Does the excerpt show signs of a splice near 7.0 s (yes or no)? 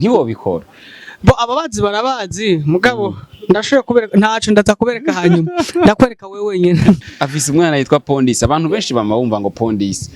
yes